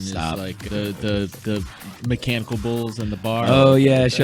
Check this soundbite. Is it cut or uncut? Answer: uncut